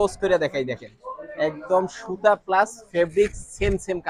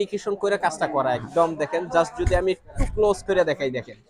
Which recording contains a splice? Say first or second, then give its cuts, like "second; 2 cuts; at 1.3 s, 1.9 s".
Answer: second; 1 cut; at 1.3 s